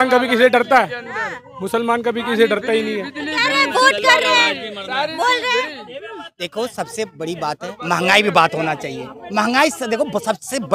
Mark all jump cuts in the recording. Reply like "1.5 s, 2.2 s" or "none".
none